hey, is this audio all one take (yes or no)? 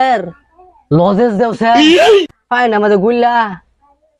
yes